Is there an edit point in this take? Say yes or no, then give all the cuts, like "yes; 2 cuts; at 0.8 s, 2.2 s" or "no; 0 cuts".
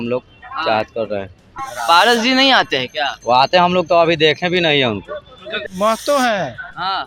yes; 2 cuts; at 1.7 s, 5.6 s